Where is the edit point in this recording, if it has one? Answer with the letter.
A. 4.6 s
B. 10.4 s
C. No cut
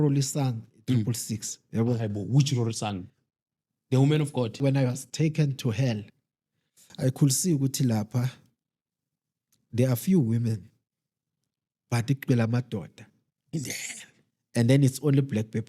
A